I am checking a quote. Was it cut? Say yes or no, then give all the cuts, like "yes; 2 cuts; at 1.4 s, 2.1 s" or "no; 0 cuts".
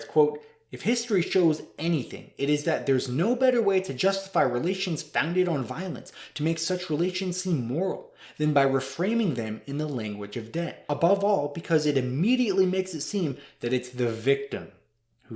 yes; 1 cut; at 10.8 s